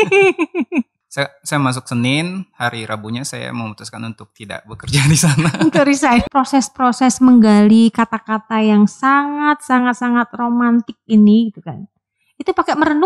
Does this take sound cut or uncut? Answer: cut